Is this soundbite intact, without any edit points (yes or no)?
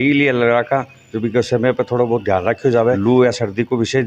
no